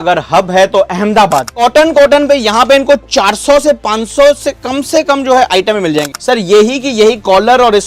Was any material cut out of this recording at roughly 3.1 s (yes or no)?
no